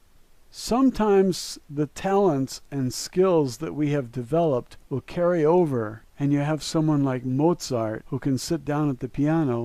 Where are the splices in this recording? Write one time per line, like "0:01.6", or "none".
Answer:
none